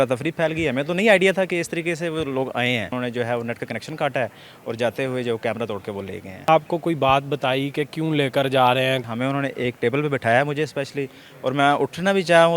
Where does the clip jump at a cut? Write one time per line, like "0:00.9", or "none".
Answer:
0:02.9
0:06.5
0:09.1

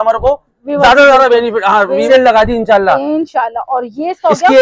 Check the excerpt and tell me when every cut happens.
0:02.1

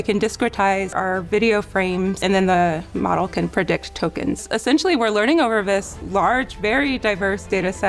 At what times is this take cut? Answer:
0:00.9
0:02.2
0:04.4

